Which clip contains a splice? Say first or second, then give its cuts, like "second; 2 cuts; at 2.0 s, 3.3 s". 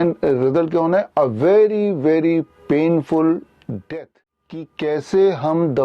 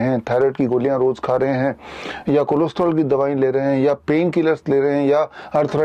first; 1 cut; at 4.7 s